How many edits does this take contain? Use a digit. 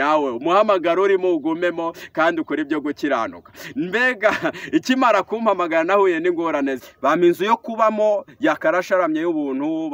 1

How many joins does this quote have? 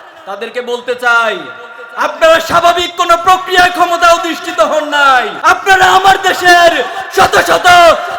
1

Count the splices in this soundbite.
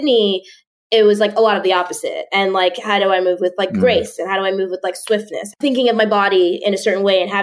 1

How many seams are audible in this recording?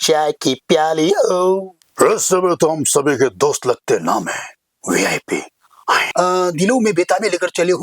2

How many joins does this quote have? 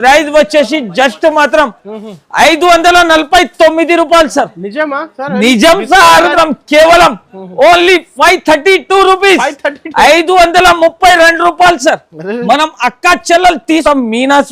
2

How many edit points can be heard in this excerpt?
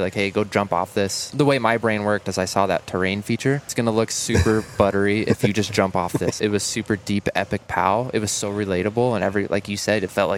3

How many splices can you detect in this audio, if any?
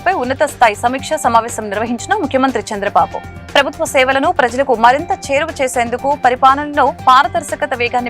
0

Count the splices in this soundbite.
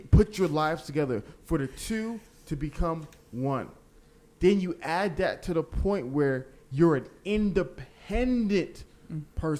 1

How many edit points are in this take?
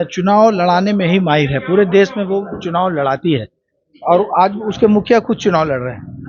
0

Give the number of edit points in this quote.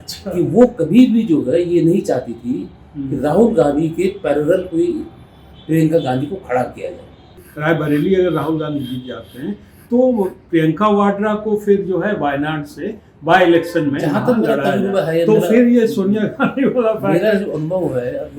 1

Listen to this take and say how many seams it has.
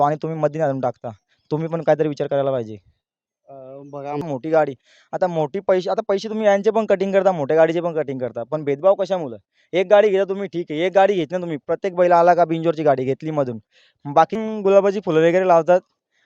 2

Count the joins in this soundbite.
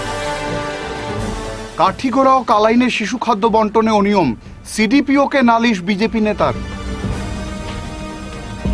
1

